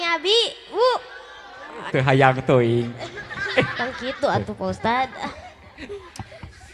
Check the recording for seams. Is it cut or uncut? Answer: cut